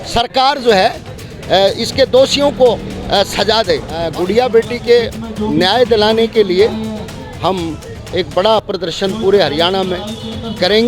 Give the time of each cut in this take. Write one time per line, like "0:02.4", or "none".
0:04.0